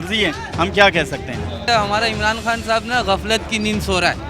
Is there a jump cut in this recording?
yes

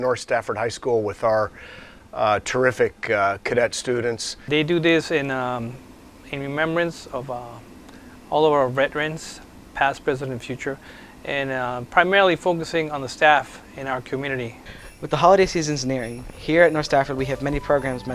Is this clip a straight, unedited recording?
no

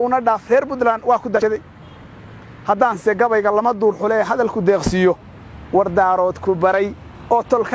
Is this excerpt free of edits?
no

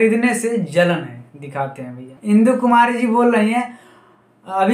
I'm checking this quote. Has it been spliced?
yes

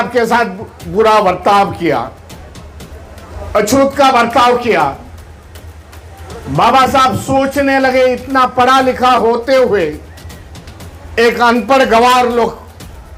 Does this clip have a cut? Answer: no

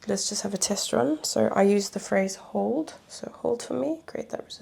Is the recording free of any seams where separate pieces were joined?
yes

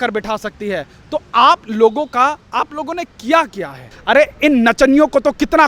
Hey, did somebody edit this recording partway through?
yes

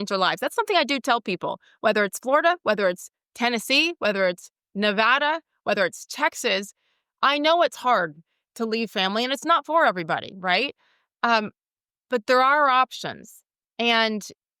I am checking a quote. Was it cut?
no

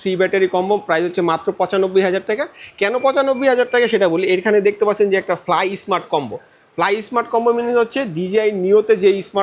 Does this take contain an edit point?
no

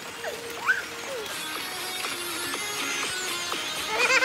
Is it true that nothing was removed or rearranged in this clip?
yes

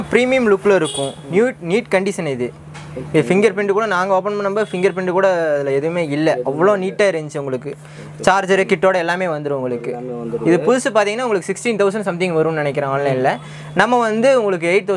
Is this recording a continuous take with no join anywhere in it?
yes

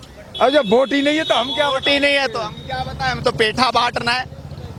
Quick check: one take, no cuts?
yes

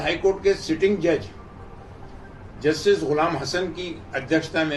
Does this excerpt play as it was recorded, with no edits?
yes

